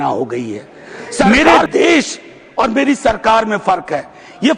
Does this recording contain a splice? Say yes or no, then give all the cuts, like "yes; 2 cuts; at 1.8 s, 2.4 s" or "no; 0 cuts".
yes; 1 cut; at 1.2 s